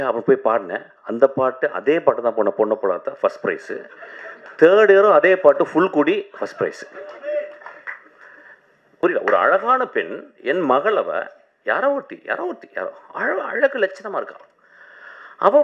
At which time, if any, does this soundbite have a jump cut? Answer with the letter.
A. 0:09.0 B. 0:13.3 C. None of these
A